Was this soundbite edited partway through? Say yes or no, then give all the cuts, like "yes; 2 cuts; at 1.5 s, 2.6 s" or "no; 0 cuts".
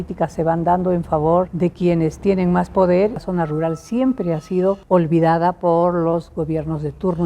yes; 3 cuts; at 1.5 s, 3.3 s, 4.8 s